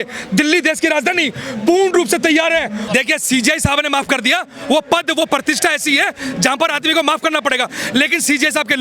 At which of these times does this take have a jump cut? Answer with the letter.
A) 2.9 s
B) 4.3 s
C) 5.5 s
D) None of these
A